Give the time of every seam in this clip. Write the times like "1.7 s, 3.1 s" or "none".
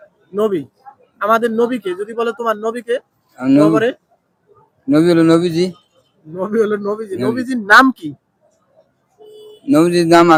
none